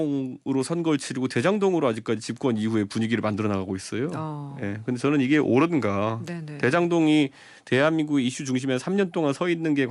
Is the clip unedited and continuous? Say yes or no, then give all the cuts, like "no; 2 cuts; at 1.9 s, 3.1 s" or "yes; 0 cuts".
yes; 0 cuts